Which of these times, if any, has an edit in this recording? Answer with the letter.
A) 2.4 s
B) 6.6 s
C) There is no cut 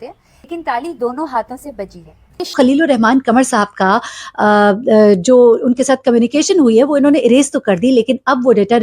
A